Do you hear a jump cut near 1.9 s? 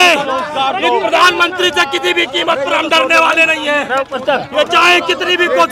no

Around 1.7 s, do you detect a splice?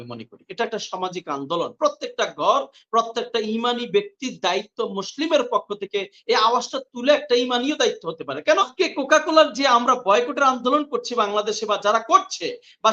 no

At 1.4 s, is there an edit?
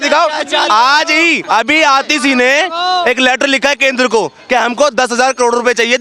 yes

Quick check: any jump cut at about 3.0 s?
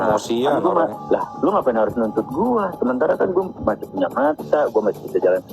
no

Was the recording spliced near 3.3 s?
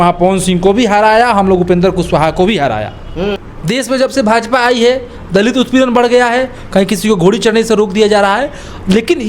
yes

